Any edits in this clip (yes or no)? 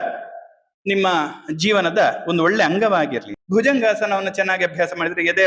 yes